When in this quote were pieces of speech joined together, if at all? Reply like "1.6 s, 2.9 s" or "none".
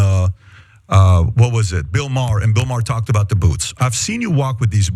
3.2 s